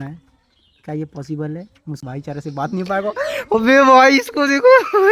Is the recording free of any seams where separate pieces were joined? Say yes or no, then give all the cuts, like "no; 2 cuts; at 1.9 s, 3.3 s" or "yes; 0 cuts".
no; 1 cut; at 2.0 s